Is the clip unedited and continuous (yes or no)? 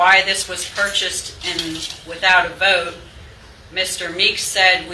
yes